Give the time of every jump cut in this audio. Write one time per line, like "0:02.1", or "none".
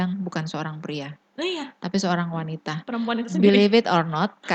none